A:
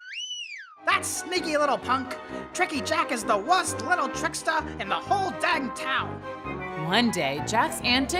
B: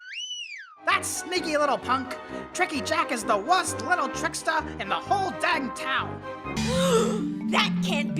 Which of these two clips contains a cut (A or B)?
B